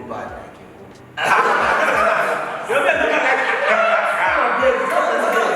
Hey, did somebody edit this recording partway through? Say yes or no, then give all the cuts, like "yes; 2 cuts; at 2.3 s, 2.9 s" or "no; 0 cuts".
no; 0 cuts